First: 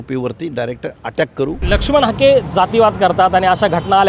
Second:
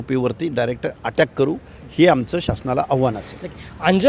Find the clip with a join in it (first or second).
first